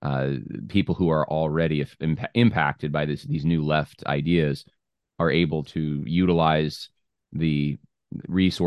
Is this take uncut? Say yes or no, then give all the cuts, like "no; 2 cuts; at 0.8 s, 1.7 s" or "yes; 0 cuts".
no; 1 cut; at 5.7 s